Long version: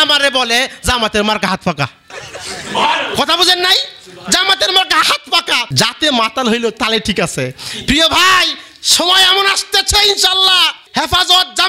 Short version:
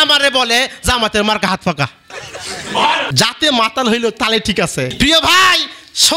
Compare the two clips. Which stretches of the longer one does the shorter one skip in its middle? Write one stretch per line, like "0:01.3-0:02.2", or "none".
0:03.1-0:05.7
0:07.5-0:07.8